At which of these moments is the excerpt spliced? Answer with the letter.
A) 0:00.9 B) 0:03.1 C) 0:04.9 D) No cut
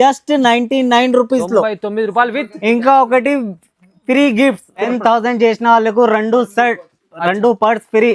C